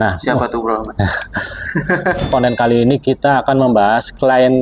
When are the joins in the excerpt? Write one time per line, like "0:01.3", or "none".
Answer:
0:02.3